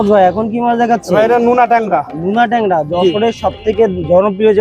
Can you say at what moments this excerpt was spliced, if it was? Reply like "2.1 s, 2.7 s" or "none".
none